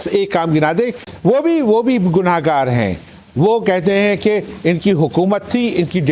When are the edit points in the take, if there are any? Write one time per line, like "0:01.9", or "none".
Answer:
0:01.1